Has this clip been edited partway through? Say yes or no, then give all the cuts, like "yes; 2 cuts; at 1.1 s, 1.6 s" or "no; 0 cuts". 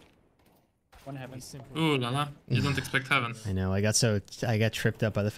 yes; 1 cut; at 3.4 s